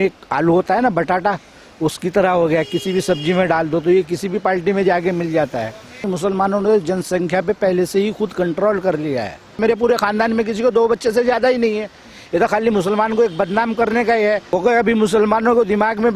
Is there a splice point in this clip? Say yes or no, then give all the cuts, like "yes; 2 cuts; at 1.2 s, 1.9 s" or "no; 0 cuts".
yes; 3 cuts; at 6.1 s, 9.6 s, 14.4 s